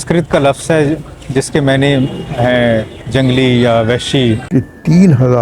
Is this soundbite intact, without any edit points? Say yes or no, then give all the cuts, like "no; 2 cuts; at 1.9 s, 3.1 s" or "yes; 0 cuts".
no; 1 cut; at 4.4 s